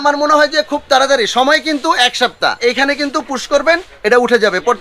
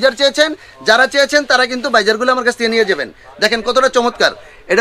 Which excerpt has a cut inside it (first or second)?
first